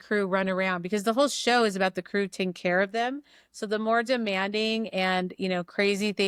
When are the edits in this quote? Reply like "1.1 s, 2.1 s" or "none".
none